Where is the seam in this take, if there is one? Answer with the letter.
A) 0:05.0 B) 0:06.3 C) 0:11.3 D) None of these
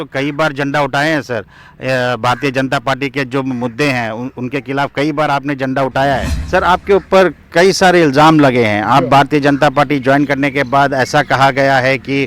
B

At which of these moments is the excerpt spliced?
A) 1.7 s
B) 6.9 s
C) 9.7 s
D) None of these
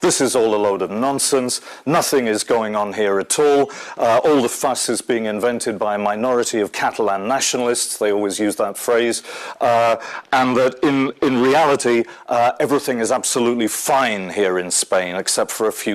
D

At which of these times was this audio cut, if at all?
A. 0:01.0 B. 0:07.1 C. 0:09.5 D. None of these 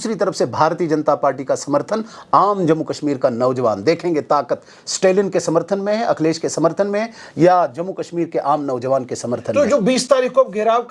D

